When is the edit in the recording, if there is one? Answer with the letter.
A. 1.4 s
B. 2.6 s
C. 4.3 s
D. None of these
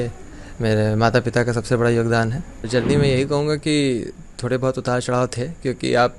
B